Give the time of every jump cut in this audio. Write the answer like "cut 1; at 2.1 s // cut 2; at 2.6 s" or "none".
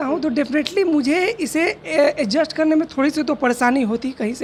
none